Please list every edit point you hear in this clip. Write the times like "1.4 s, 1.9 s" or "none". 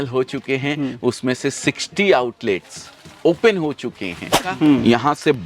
4.6 s